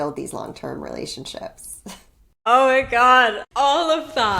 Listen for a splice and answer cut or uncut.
cut